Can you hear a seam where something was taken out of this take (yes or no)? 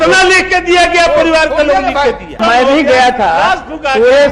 yes